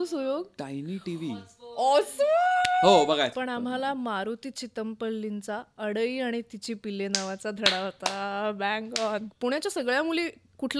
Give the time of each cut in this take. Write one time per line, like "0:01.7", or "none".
0:03.4
0:09.3